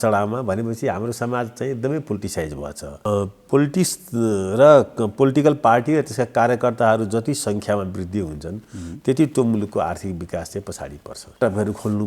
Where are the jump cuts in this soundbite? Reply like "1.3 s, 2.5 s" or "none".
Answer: 3.0 s, 11.4 s